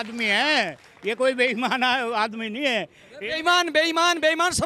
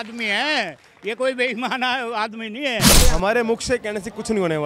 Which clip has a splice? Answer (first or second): second